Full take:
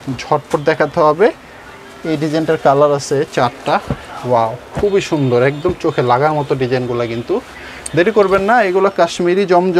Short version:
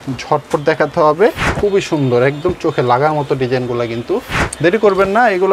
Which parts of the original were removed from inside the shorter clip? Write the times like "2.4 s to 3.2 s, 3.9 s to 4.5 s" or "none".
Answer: 1.5 s to 4.7 s, 7.6 s to 7.7 s